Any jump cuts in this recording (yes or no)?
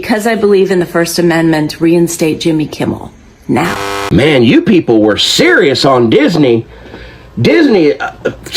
yes